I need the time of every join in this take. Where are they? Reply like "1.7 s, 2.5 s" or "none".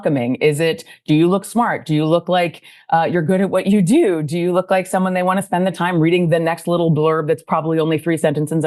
none